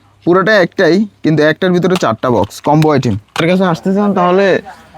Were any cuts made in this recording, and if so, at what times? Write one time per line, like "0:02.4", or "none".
0:03.4